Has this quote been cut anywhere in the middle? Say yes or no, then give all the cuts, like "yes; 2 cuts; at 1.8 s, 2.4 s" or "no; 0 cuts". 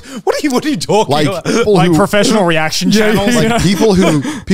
yes; 1 cut; at 1.7 s